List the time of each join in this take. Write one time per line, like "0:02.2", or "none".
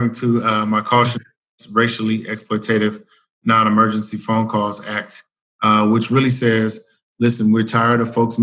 none